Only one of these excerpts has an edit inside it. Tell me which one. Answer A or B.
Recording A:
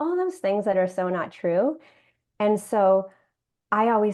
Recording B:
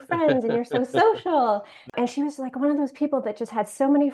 B